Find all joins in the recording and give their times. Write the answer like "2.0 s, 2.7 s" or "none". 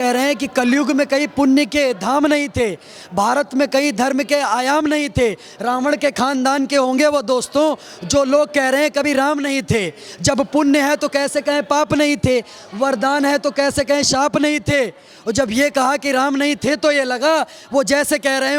none